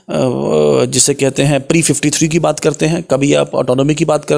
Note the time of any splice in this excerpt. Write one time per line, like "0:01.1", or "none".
none